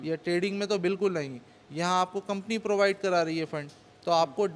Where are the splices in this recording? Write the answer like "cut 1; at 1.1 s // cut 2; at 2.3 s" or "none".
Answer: none